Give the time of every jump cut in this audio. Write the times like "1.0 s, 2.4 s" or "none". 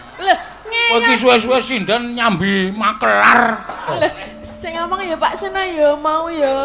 4.0 s